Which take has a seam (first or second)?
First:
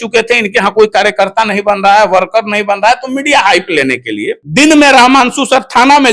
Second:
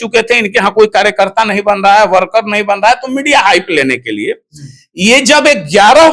first